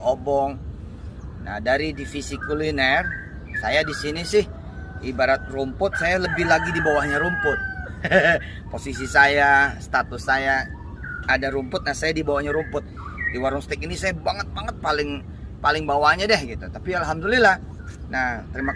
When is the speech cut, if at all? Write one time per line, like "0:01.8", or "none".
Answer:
none